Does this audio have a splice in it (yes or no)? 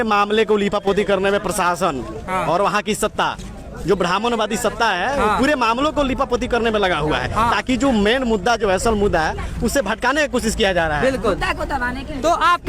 no